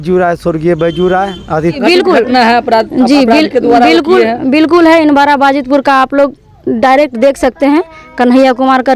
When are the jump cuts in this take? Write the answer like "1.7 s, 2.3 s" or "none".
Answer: 1.8 s